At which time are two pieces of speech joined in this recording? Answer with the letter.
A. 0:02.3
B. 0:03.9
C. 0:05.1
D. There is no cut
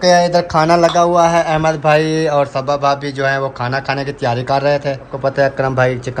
C